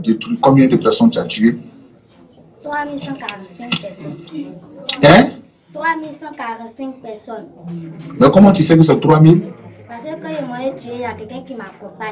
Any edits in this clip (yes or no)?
no